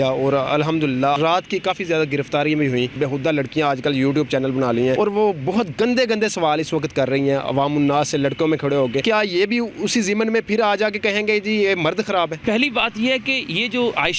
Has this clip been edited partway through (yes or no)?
yes